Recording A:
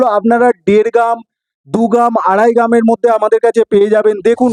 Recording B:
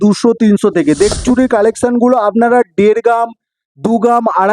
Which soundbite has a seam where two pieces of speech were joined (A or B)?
B